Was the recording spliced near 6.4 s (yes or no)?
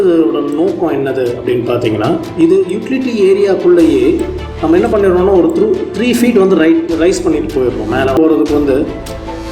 no